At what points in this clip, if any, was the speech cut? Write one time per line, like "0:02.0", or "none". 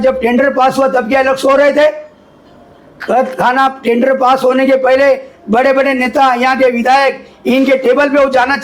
none